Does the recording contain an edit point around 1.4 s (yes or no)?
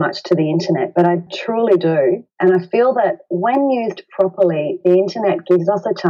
yes